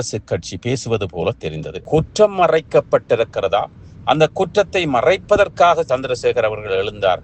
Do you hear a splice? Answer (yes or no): yes